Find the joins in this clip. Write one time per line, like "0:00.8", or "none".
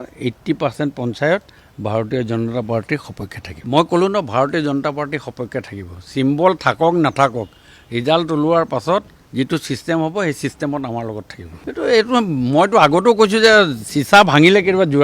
none